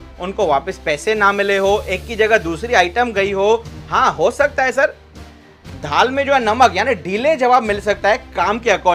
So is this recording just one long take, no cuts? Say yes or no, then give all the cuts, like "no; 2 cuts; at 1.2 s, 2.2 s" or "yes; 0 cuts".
yes; 0 cuts